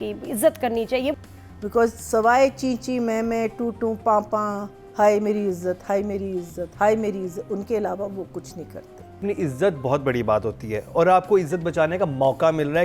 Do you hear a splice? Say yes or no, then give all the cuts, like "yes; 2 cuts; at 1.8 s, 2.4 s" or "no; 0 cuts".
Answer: yes; 2 cuts; at 1.1 s, 9.2 s